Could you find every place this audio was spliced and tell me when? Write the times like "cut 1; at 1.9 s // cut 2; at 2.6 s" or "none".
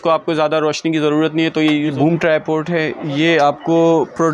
cut 1; at 1.9 s